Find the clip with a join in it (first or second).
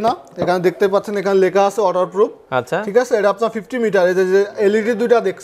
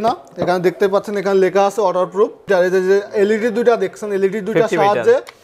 second